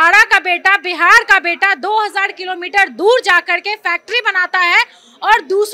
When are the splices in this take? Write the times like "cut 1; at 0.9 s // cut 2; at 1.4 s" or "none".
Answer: none